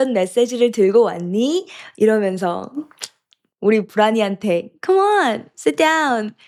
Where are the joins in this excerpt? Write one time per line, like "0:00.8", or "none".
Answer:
none